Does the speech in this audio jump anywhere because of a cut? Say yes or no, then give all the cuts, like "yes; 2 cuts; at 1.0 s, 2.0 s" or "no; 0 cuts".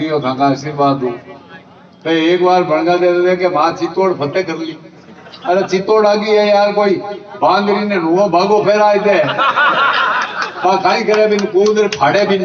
no; 0 cuts